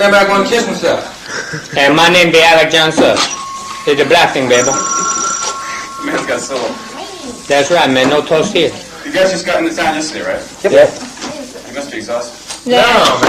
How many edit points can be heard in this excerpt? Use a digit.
1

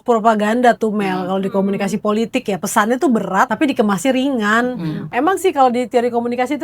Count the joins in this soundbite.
2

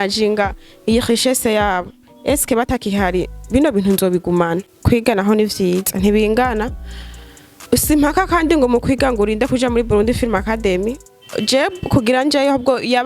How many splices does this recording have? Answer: 1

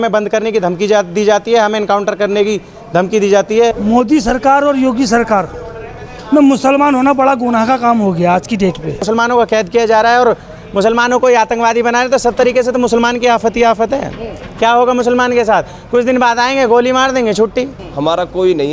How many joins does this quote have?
3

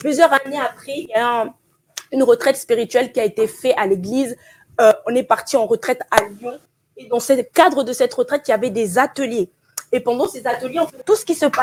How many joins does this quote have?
0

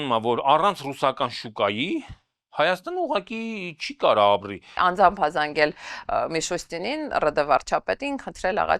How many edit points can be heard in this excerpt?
1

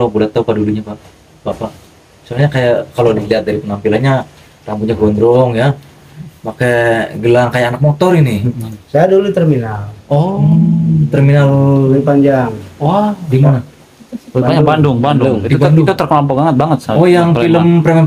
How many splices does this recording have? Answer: 0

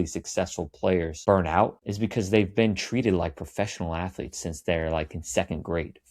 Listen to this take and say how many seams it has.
2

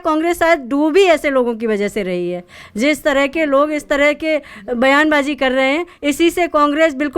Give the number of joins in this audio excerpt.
0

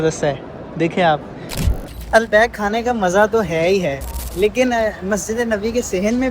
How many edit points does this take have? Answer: 1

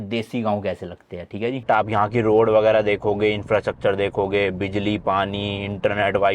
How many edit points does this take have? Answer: 1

